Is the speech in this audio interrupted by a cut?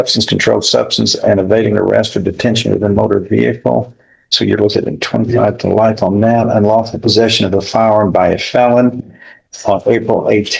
no; 0 cuts

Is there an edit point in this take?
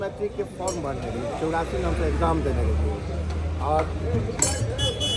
no; 0 cuts

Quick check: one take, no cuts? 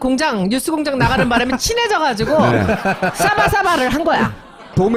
yes; 0 cuts

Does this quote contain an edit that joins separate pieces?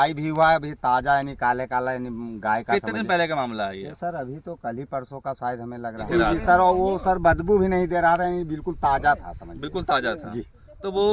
yes; 1 cut; at 6.1 s

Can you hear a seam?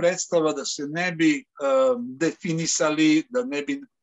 no; 0 cuts

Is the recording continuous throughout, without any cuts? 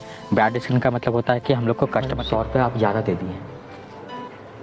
no; 1 cut; at 2.2 s

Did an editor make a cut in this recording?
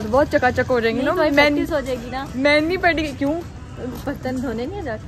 no; 0 cuts

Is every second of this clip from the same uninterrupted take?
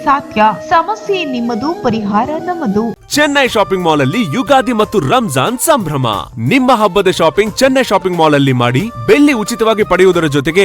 no; 1 cut; at 2.9 s

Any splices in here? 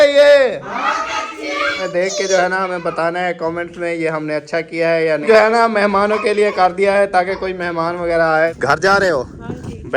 yes; 3 cuts; at 1.8 s, 5.3 s, 8.5 s

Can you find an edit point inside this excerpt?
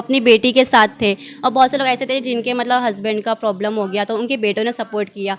no; 0 cuts

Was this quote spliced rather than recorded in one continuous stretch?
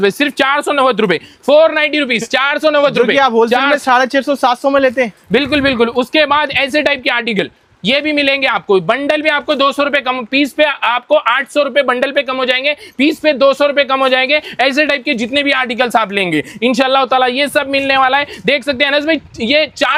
no; 0 cuts

